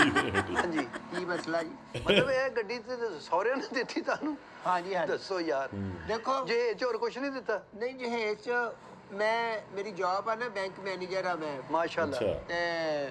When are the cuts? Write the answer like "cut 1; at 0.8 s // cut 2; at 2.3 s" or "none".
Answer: none

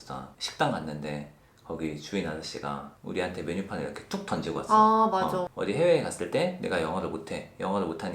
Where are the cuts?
cut 1; at 5.5 s

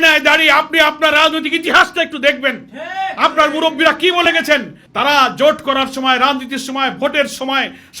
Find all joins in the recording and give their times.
none

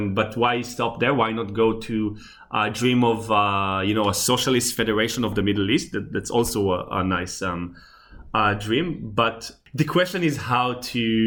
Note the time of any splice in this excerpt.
none

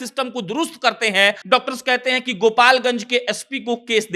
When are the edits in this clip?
cut 1; at 1.4 s

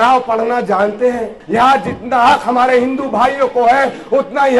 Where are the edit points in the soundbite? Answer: cut 1; at 1.4 s

